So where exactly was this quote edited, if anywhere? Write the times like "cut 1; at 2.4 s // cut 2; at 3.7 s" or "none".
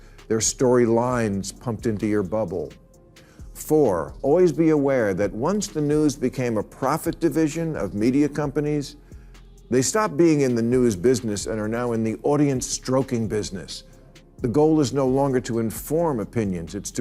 none